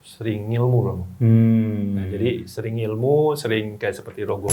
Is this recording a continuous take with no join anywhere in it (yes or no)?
no